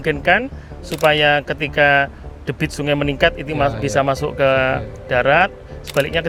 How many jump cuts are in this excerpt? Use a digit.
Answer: 0